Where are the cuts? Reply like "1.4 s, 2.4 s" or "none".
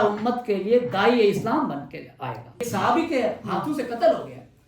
2.7 s